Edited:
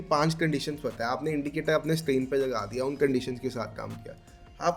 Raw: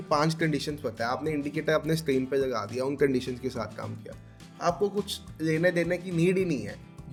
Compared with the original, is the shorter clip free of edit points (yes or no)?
yes